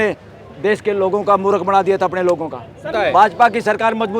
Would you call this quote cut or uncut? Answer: cut